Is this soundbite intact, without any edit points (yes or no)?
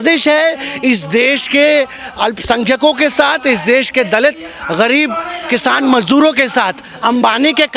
yes